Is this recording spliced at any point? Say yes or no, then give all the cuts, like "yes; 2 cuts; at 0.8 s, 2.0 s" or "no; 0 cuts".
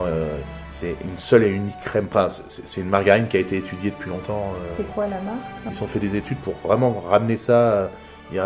yes; 2 cuts; at 2.1 s, 5.5 s